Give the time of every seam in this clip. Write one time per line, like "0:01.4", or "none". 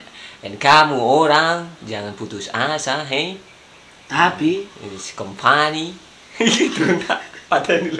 none